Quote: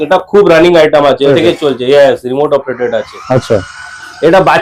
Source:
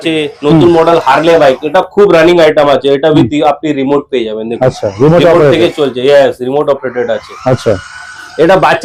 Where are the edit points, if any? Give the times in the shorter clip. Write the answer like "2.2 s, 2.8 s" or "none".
1.3 s